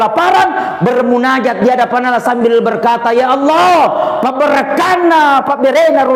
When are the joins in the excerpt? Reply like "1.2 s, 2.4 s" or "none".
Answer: none